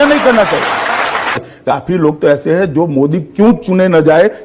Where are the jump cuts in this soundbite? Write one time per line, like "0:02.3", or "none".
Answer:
none